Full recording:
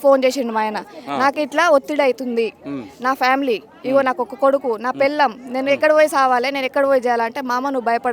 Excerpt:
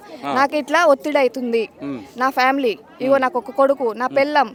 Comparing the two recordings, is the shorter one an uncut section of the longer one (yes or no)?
yes